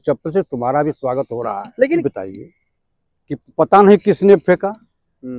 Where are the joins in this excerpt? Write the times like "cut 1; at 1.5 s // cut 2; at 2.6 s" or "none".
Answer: cut 1; at 2.0 s